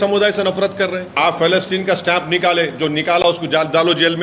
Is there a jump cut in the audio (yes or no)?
yes